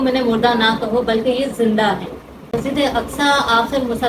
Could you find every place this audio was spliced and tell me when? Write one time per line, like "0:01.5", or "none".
0:02.5